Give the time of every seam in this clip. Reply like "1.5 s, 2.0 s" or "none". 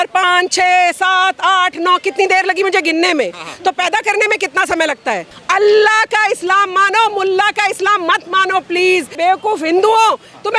5.3 s, 9.2 s